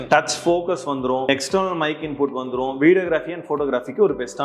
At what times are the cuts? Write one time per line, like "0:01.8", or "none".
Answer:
0:01.3